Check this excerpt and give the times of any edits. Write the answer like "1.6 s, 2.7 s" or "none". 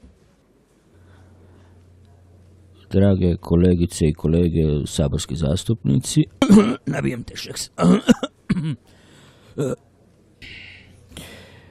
none